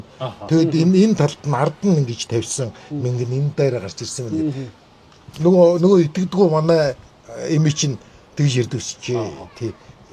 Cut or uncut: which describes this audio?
uncut